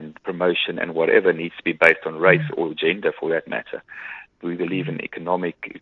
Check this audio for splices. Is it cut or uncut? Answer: cut